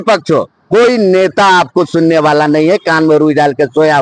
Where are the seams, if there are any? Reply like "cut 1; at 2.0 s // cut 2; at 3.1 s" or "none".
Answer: none